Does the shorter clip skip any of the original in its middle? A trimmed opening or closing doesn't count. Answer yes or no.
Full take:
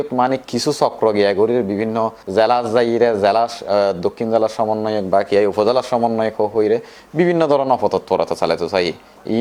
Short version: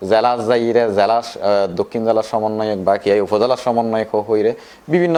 no